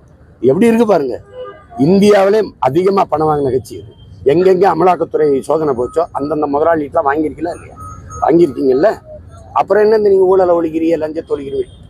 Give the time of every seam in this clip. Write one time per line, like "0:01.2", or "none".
0:01.6